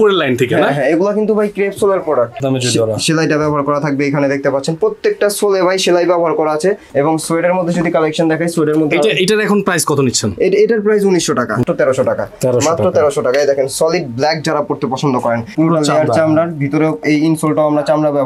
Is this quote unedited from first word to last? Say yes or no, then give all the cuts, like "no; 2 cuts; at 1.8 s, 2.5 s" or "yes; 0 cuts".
no; 4 cuts; at 2.4 s, 6.8 s, 11.6 s, 15.5 s